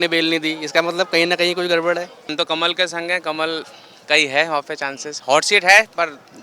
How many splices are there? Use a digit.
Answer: 1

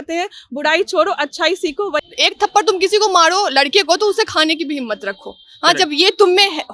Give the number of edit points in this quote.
1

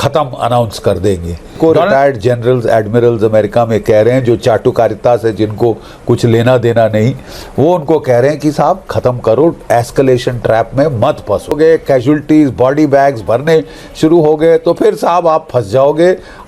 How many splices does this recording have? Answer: 2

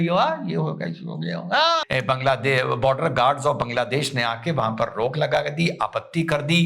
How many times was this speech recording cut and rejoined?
1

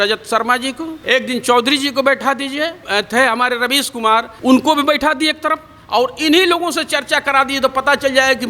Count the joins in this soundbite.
3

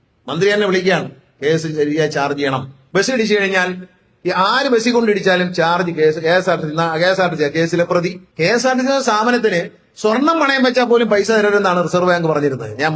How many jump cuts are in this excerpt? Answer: 2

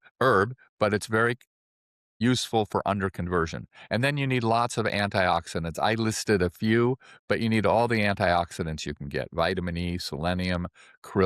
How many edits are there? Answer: 0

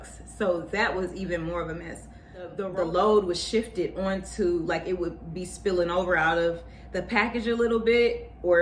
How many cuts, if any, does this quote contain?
1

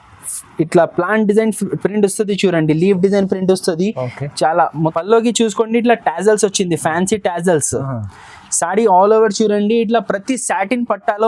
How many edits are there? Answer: 1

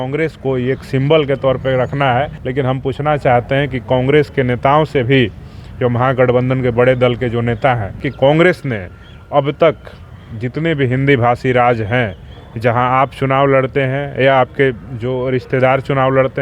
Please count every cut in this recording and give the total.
2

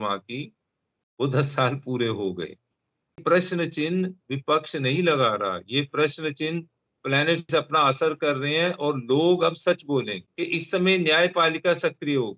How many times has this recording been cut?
2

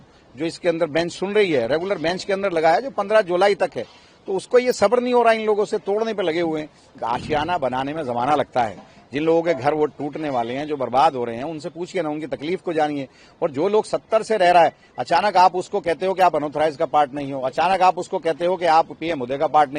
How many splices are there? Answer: 1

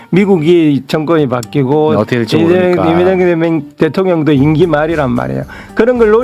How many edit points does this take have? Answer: 1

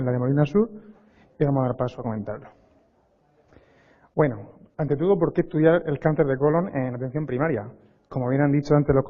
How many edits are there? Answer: 1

